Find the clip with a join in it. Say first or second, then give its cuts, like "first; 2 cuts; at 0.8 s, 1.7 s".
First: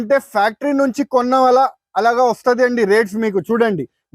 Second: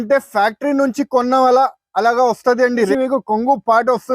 second; 1 cut; at 2.9 s